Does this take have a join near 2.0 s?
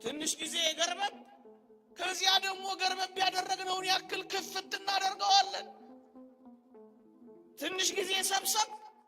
no; 2 cuts; at 6.1 s, 7.6 s

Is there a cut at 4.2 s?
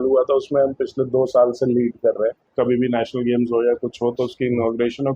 no; 1 cut; at 2.5 s

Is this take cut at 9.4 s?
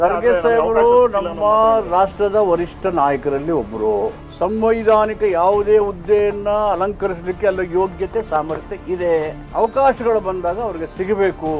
yes; 2 cuts; at 4.2 s, 9.4 s

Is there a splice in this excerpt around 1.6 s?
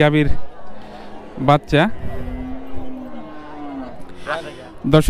no; 1 cut; at 3.9 s

